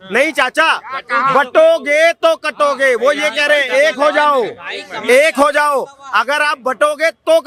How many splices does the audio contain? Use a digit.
0